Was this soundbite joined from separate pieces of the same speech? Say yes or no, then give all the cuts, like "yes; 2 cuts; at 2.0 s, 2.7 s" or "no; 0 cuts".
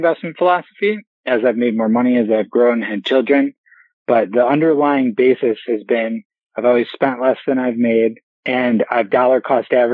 no; 0 cuts